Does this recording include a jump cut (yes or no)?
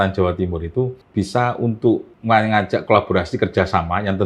yes